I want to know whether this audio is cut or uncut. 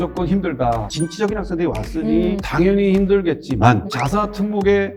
cut